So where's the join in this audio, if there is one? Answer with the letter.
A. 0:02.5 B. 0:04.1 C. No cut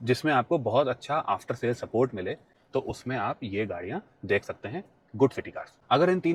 C